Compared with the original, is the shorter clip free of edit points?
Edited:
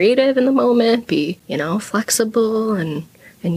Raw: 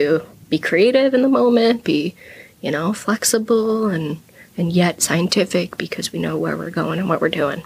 no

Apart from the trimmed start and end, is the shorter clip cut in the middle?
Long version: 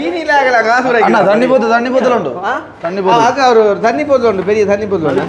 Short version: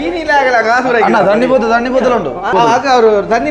yes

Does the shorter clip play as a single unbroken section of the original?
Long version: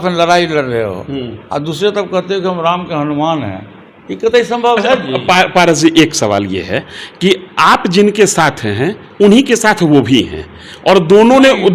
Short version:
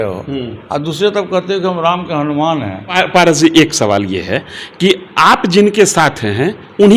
no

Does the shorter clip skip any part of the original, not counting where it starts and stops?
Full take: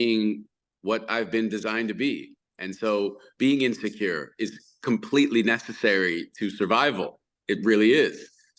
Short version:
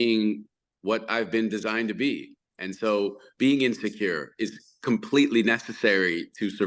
no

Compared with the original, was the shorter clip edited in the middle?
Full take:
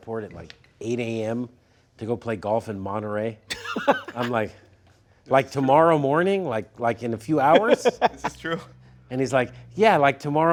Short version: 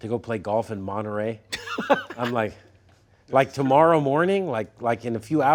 no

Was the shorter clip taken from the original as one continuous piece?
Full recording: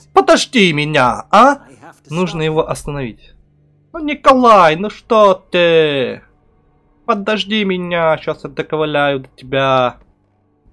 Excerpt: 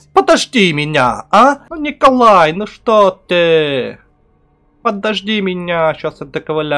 no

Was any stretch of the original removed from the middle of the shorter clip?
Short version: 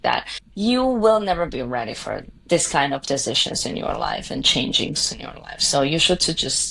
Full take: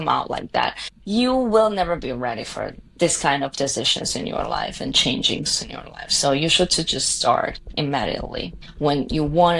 no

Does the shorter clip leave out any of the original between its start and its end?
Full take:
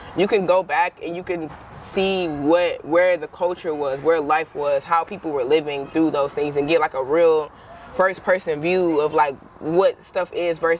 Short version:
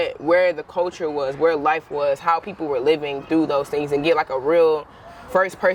no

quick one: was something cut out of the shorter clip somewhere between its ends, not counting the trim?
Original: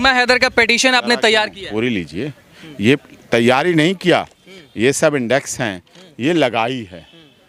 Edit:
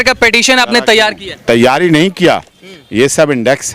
yes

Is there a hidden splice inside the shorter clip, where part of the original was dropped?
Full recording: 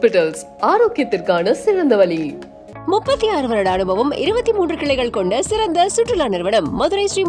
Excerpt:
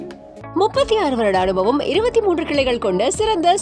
no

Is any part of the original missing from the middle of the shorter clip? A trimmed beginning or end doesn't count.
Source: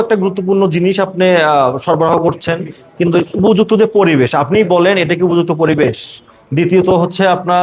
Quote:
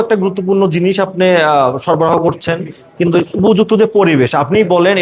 no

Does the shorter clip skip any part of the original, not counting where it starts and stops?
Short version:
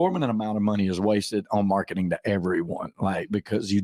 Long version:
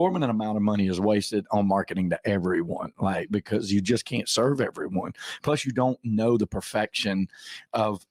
no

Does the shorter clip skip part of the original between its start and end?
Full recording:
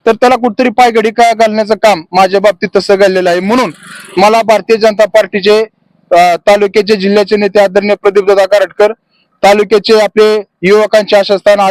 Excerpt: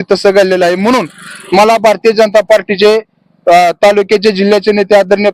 no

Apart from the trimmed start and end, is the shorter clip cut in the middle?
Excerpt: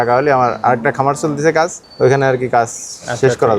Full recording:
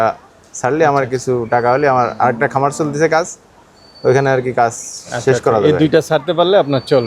yes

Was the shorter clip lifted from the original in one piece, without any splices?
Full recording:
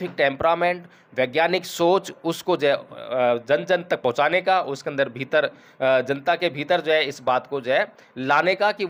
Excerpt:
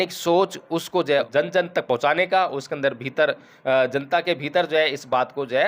no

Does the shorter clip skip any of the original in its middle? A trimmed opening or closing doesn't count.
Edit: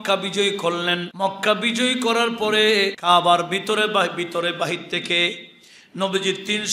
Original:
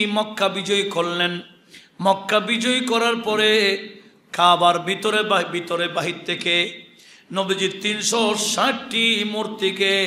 yes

